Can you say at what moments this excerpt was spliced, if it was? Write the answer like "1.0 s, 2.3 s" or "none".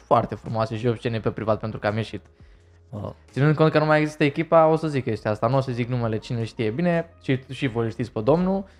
none